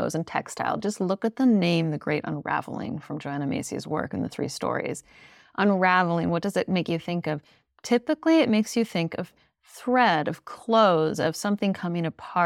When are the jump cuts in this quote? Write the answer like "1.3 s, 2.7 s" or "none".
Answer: none